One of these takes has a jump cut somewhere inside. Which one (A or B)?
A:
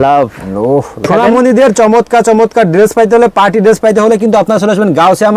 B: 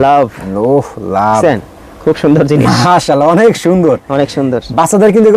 A